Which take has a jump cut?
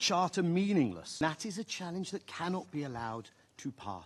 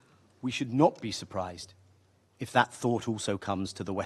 first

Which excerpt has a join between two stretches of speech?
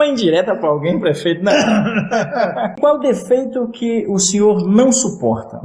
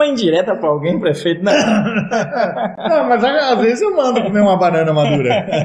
first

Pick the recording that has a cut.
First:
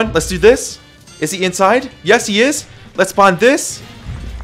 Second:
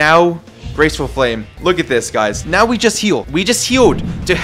second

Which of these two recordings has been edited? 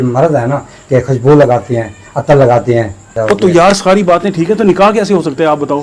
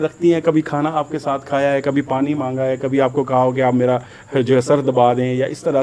first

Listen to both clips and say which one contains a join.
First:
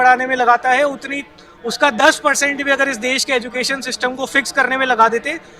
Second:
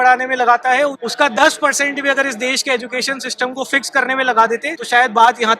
second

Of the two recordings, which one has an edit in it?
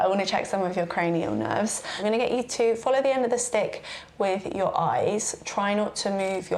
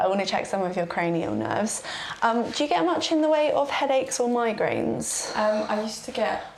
first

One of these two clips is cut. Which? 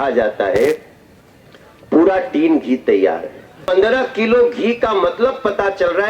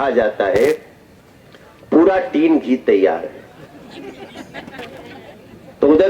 first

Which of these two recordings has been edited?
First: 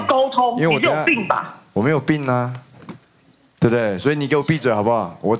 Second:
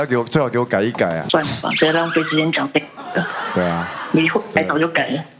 second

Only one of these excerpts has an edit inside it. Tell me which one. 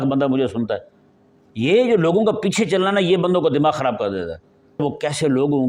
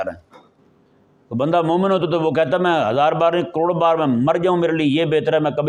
first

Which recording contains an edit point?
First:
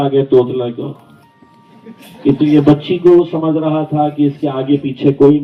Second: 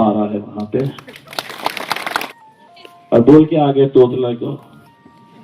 second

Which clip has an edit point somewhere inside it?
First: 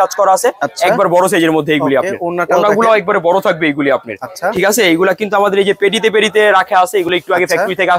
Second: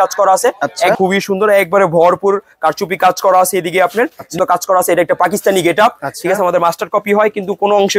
second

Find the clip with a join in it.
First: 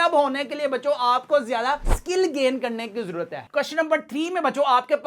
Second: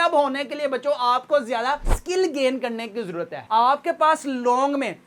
first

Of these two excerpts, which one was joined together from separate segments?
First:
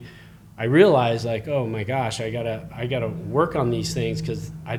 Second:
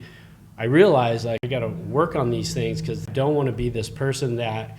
second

